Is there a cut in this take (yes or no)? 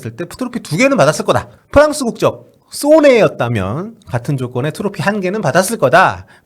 yes